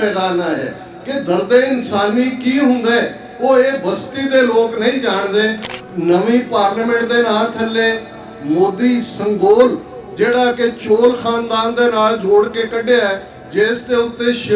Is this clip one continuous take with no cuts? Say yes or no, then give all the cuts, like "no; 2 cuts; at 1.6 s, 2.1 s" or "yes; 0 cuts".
no; 1 cut; at 5.7 s